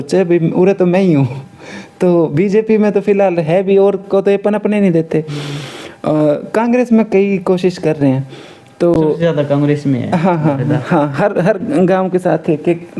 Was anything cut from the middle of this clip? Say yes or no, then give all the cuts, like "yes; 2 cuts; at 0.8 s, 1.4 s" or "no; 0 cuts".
no; 0 cuts